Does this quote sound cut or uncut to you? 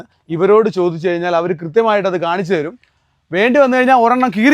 uncut